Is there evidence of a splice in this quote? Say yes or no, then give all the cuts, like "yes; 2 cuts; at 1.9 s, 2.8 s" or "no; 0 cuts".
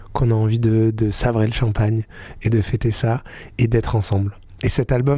no; 0 cuts